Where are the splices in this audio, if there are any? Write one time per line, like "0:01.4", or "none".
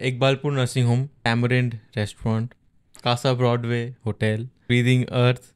0:01.1
0:02.9
0:04.6